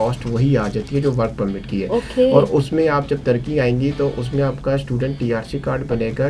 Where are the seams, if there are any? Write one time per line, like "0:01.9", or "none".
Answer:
none